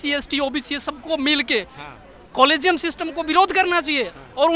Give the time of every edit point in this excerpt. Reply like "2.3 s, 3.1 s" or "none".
none